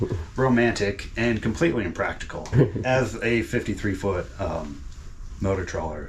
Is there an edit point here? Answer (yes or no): yes